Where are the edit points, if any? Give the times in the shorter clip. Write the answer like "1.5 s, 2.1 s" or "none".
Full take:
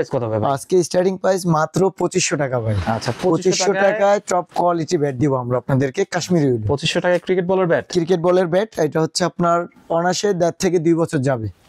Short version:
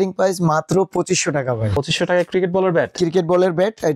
1.7 s